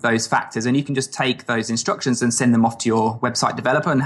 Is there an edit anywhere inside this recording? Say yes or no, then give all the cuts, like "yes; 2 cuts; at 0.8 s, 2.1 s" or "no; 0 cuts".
no; 0 cuts